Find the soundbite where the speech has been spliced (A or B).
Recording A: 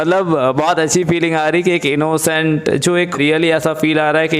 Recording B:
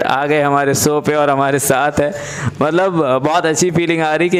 A